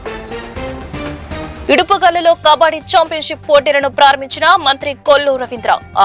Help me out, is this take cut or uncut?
cut